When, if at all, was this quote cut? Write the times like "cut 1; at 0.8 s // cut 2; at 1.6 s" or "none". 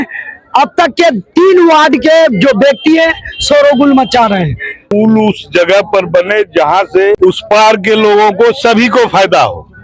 cut 1; at 4.8 s // cut 2; at 7.2 s